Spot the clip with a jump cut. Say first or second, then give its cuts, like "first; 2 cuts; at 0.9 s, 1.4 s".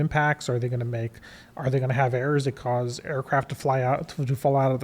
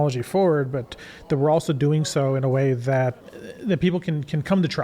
second; 1 cut; at 3.2 s